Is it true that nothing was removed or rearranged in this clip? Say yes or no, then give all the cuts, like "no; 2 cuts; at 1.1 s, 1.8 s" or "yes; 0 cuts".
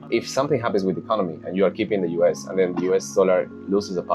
yes; 0 cuts